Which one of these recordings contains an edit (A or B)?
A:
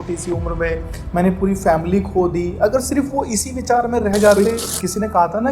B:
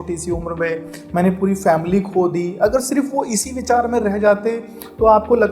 A